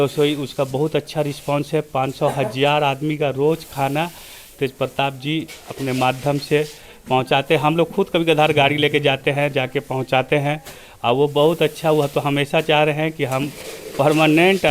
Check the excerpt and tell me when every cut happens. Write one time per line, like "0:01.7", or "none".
none